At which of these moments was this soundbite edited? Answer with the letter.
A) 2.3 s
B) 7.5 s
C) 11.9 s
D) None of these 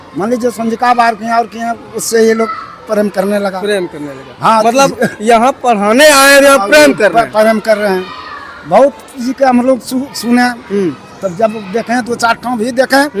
D